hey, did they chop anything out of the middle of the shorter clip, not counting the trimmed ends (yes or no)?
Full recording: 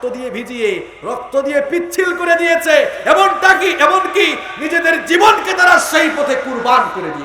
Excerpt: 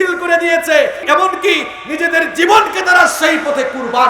yes